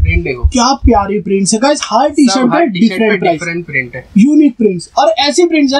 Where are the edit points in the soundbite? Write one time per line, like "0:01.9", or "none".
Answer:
none